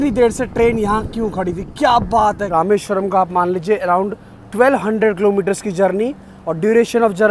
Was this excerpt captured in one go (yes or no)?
no